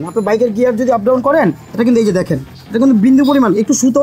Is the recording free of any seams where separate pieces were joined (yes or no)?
yes